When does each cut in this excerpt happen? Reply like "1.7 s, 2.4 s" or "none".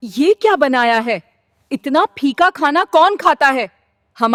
none